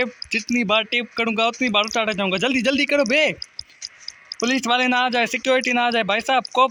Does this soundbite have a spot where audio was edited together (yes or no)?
no